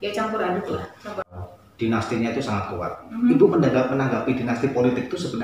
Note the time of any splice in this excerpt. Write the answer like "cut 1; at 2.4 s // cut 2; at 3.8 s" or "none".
cut 1; at 1.4 s

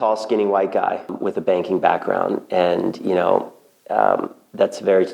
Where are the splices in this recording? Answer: cut 1; at 1.1 s

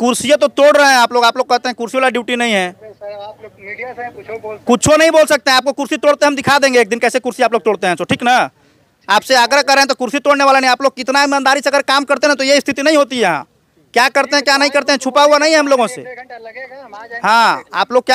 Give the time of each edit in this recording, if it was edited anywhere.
none

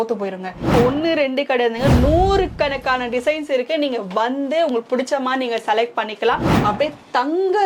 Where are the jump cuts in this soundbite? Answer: cut 1; at 0.7 s // cut 2; at 6.5 s

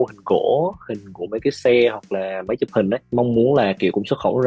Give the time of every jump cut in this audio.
cut 1; at 3.0 s

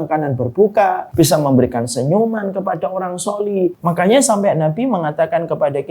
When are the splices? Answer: cut 1; at 1.0 s // cut 2; at 3.8 s

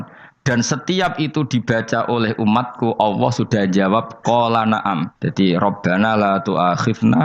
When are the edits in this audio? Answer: cut 1; at 5.2 s

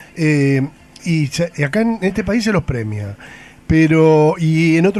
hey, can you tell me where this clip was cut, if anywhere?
cut 1; at 3.5 s

